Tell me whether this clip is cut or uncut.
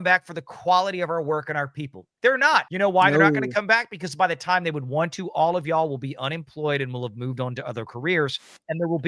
cut